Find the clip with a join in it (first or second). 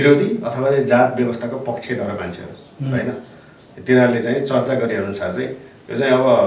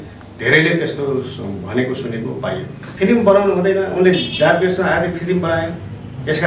second